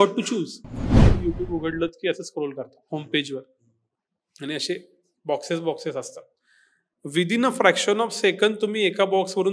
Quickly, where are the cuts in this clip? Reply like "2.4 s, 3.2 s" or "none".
1.1 s